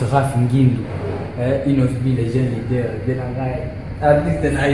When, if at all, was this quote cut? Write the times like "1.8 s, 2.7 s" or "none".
none